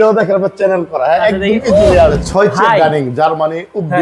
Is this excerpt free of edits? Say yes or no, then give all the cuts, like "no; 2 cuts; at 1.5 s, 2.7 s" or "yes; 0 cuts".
no; 1 cut; at 2.0 s